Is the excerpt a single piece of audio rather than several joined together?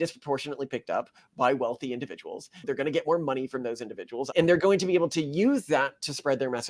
no; 2 cuts; at 2.6 s, 4.3 s

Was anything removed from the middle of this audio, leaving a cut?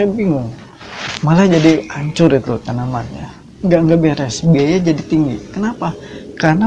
no; 0 cuts

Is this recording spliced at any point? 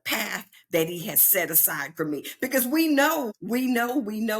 yes; 1 cut; at 3.4 s

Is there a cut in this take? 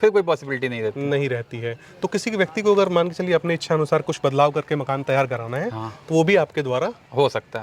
no; 0 cuts

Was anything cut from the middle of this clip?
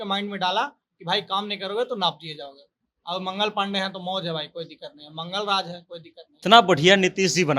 yes; 1 cut; at 6.3 s

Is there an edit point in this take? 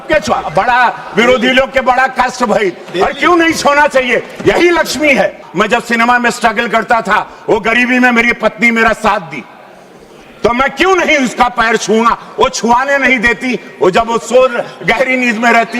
yes; 1 cut; at 5.4 s

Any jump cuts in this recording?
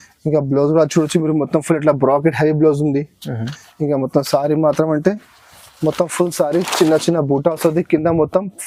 no; 0 cuts

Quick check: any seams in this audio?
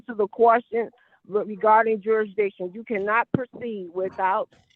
no; 0 cuts

